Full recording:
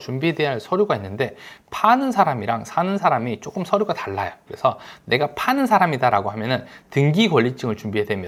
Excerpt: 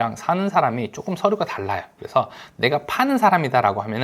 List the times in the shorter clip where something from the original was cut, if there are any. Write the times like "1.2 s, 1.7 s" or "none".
none